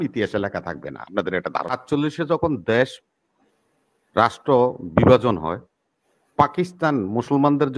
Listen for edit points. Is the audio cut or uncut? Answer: cut